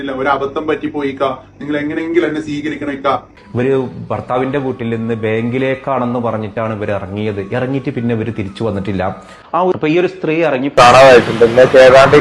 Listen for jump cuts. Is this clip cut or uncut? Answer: cut